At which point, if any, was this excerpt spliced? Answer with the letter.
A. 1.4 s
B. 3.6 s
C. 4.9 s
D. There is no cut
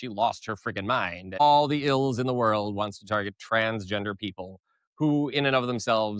A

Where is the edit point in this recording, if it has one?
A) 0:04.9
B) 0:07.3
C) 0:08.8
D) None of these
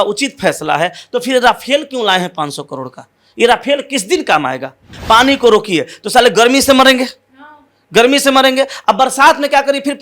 A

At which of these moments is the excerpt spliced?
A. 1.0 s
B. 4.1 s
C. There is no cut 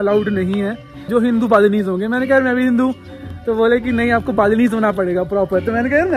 A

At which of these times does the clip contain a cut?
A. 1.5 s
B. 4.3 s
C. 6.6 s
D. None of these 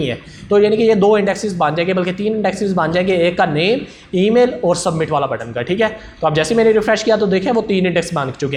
D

